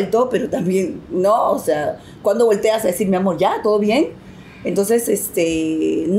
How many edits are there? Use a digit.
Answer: 0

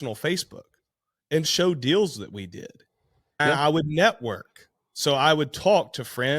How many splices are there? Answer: 2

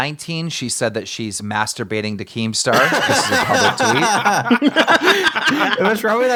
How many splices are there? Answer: 0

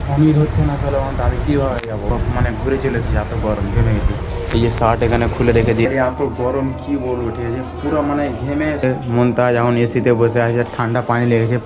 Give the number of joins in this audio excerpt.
3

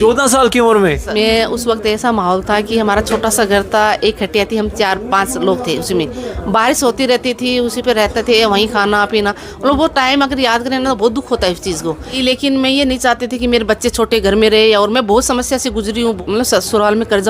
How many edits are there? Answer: 3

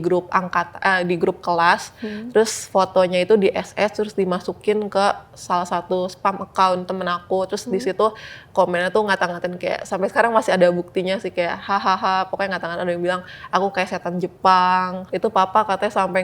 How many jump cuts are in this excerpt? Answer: 1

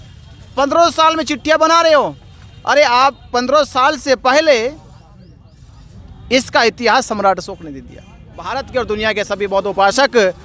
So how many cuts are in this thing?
1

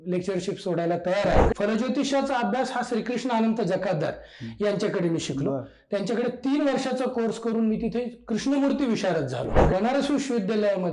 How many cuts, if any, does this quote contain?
2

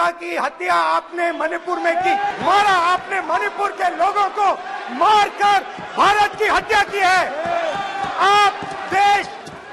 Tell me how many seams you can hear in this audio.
1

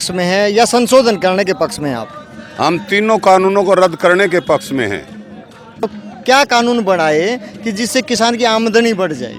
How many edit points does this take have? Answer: 0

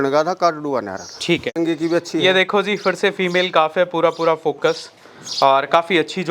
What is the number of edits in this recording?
1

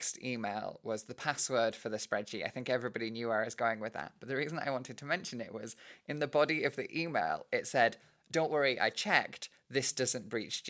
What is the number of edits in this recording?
0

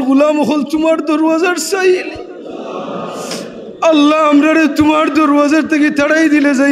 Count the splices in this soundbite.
0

